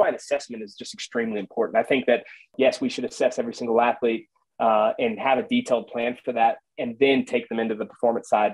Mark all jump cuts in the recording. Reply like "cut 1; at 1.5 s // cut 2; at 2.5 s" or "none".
cut 1; at 2.5 s